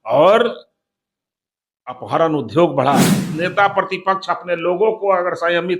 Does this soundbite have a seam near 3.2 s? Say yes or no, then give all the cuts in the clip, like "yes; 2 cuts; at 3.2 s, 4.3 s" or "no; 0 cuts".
yes; 1 cut; at 3.2 s